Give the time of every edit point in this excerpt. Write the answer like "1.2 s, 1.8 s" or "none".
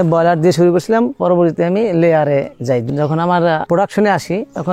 1.2 s, 2.8 s